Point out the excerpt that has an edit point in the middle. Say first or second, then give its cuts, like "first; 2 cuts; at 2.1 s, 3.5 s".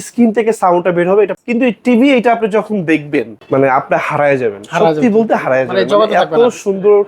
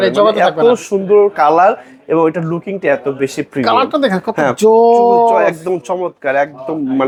first; 2 cuts; at 1.3 s, 3.4 s